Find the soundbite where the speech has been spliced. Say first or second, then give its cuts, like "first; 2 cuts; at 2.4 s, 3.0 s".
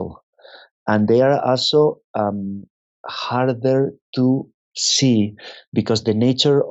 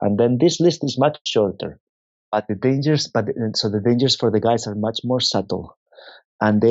second; 1 cut; at 2.3 s